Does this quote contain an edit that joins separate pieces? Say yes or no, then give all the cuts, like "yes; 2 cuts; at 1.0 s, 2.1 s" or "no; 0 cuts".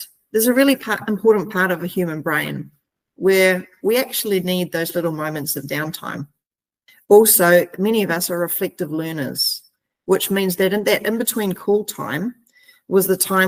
no; 0 cuts